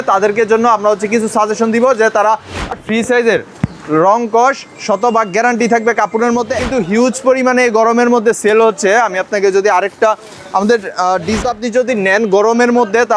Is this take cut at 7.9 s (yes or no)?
no